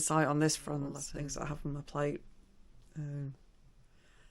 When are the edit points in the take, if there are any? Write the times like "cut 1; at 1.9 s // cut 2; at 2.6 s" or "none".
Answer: cut 1; at 1.0 s